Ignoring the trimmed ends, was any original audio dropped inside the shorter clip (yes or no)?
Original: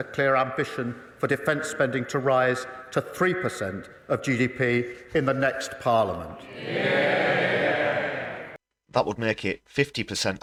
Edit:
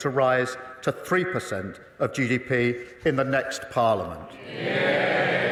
no